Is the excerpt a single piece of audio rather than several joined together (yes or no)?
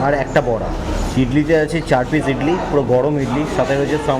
yes